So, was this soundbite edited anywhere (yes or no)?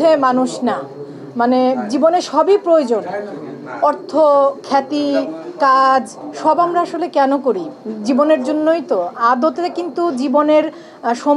no